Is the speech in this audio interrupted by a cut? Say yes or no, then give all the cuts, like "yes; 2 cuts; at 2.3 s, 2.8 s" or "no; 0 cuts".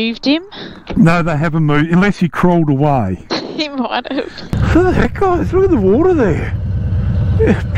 yes; 1 cut; at 4.5 s